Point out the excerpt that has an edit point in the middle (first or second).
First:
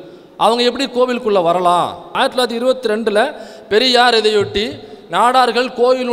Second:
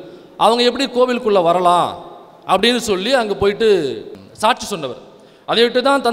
first